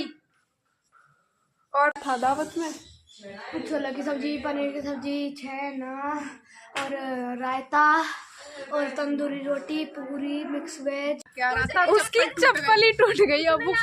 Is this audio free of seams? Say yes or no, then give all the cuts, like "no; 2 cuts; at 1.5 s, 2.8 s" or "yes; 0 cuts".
no; 2 cuts; at 2.0 s, 11.3 s